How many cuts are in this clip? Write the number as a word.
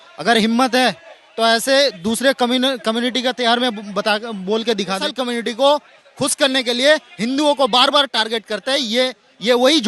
one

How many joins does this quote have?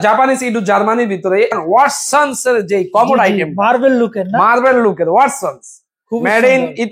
one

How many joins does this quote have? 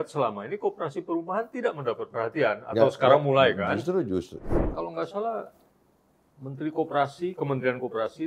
one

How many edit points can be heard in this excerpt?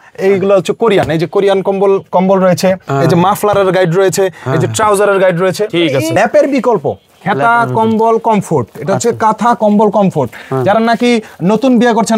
one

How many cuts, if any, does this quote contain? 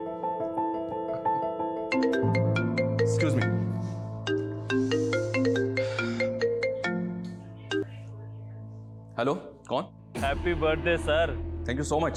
zero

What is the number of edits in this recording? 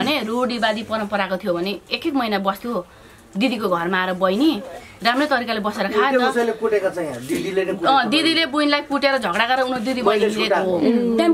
zero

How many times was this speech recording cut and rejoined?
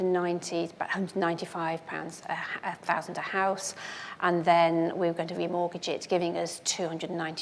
zero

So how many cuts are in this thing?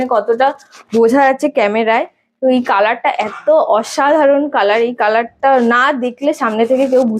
zero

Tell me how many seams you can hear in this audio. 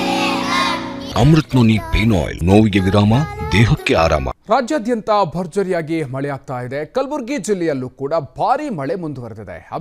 three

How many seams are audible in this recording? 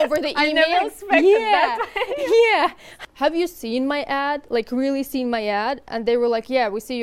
one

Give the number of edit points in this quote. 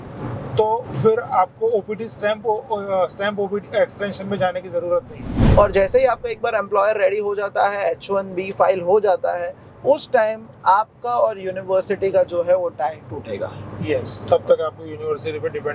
one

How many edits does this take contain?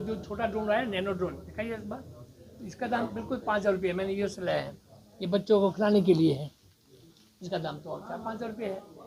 zero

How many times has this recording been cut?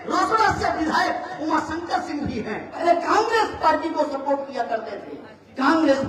one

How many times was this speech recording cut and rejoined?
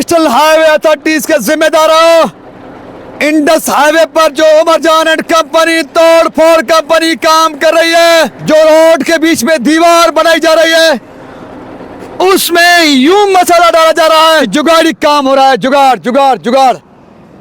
two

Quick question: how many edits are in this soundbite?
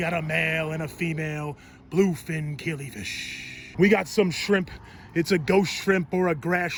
zero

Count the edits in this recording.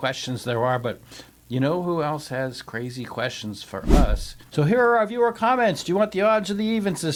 zero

